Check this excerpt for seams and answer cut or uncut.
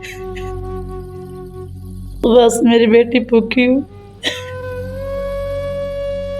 cut